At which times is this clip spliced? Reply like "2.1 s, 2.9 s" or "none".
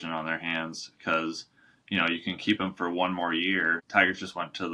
3.8 s